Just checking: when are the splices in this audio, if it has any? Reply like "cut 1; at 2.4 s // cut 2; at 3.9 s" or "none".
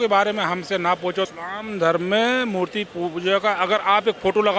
cut 1; at 1.3 s